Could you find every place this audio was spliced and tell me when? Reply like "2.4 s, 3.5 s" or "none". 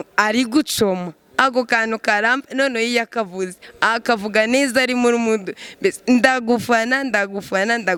none